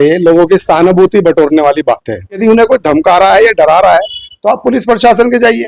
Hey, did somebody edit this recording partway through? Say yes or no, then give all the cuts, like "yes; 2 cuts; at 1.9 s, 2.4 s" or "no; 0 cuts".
yes; 1 cut; at 2.4 s